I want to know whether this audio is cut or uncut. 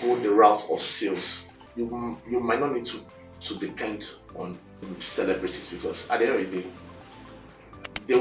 cut